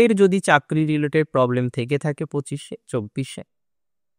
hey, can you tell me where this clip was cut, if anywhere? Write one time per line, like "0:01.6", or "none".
none